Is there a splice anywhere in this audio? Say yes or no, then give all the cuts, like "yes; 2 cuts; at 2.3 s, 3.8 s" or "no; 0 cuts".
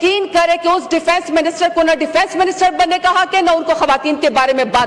no; 0 cuts